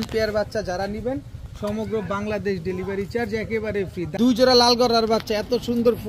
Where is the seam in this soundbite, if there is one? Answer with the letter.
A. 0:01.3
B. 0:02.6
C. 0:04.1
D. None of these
C